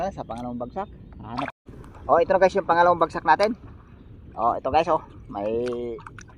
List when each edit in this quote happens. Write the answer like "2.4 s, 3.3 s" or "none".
1.5 s

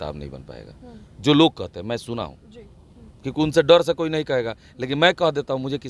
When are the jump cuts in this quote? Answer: none

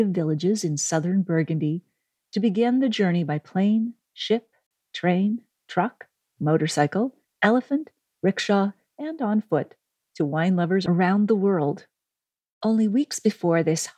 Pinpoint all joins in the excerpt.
none

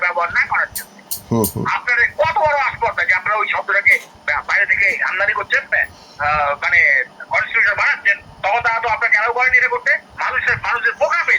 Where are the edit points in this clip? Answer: 5.7 s, 10.1 s

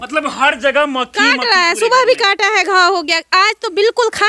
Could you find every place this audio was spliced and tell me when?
none

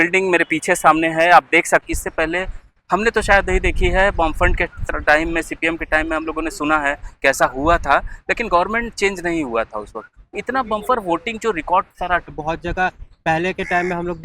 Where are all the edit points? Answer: 1.8 s, 12.3 s

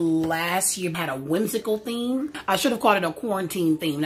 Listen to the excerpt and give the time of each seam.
1.0 s, 2.4 s

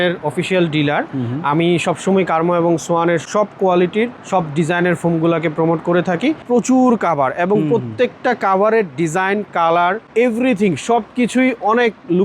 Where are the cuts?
6.4 s

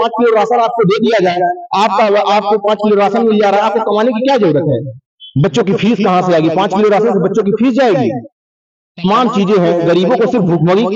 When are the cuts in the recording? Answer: none

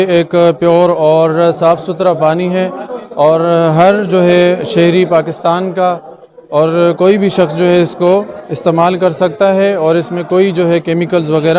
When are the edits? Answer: none

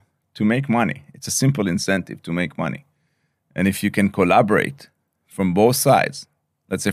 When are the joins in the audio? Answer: none

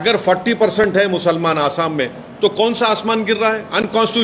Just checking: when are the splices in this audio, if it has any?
none

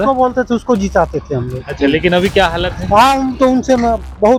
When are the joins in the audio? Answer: none

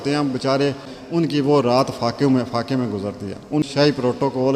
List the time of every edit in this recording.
0.9 s, 3.6 s

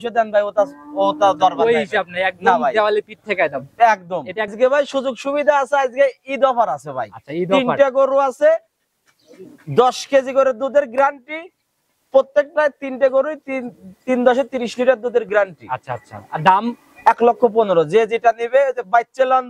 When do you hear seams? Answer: 4.5 s

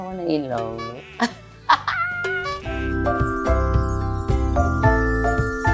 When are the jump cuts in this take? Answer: 2.4 s

